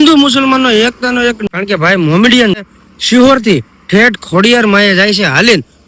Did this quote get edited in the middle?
yes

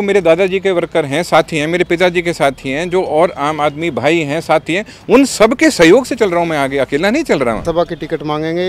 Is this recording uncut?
no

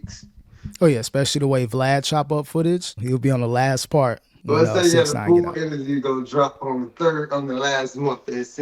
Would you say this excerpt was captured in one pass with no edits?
no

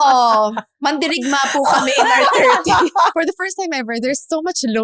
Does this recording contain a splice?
yes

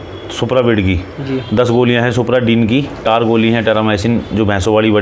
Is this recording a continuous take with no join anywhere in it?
no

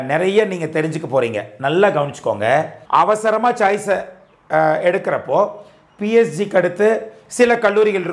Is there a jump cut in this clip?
yes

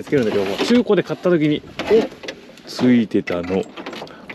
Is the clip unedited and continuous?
yes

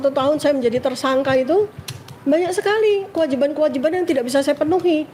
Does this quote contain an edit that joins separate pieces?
no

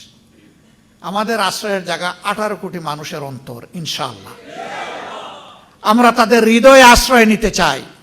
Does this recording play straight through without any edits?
yes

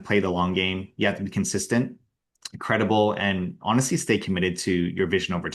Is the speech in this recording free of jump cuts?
yes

